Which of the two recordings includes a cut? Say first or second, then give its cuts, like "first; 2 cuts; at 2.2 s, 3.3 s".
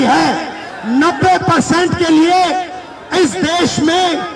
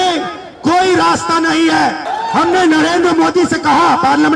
second; 1 cut; at 2.1 s